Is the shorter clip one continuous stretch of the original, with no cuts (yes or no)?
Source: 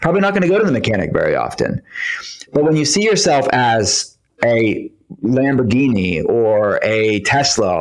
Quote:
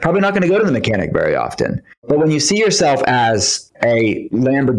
no